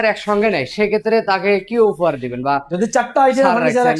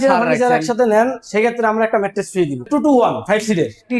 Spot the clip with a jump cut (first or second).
second